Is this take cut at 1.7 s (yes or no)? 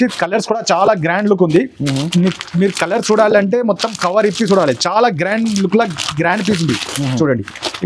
no